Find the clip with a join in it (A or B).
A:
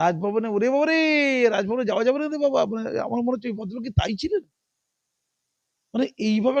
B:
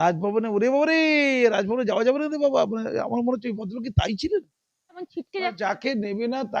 B